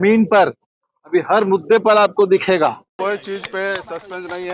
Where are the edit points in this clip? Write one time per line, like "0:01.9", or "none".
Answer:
0:02.9